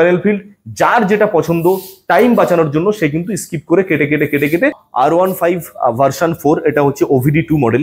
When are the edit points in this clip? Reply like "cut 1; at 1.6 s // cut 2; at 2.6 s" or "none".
cut 1; at 4.8 s